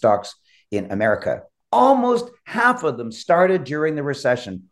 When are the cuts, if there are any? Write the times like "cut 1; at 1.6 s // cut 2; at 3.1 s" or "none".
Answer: cut 1; at 1.5 s